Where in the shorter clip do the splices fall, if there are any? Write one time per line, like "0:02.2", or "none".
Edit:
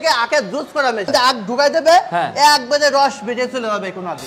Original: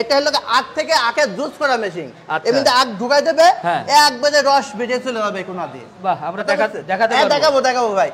0:01.1